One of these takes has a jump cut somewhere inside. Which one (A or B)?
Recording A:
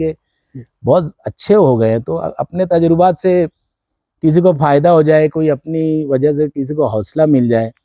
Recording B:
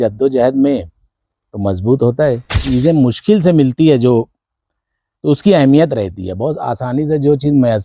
B